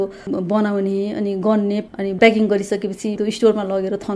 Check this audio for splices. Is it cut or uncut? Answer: cut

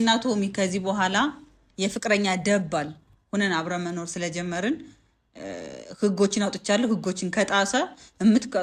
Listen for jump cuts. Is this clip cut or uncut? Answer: uncut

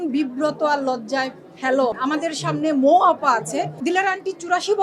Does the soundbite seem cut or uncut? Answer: cut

